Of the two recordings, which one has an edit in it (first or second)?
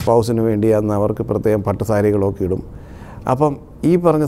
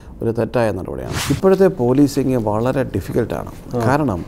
second